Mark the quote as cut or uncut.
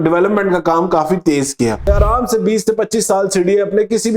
cut